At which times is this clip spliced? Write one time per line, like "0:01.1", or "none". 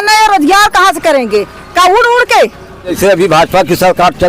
0:03.0

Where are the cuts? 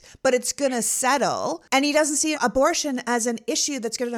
0:01.6

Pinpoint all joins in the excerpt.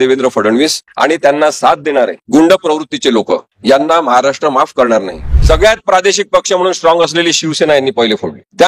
0:05.3

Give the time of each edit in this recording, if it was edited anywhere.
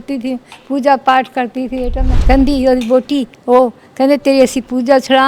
0:02.1

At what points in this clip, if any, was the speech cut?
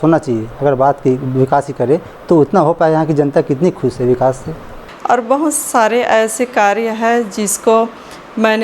0:04.9

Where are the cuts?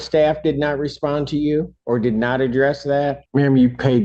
0:01.8
0:03.2

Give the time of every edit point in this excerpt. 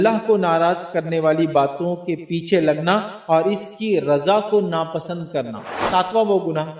0:05.9

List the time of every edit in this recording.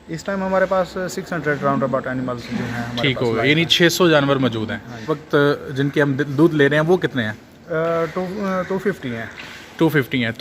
0:05.1

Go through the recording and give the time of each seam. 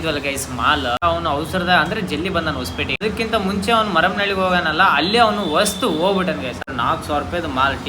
0:01.0
0:03.0
0:06.6

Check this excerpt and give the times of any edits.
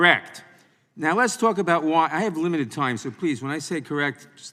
none

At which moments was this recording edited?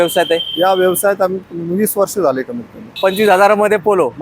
0:03.0

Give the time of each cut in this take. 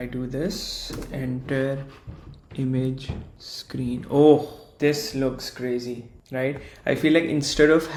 none

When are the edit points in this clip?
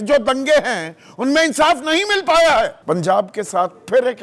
0:02.8

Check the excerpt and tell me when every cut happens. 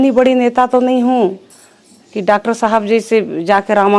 none

